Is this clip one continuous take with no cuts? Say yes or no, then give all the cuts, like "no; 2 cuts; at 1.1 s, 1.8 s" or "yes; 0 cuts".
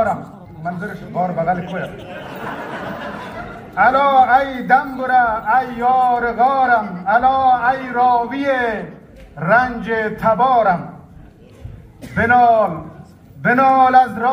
yes; 0 cuts